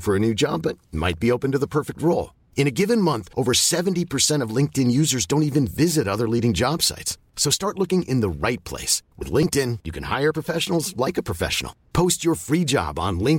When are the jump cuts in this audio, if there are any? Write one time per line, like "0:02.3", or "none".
none